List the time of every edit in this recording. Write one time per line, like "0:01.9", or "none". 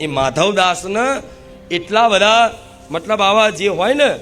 none